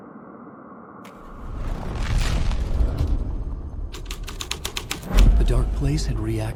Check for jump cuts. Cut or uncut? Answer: uncut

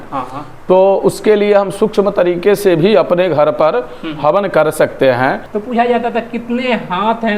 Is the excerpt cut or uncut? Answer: cut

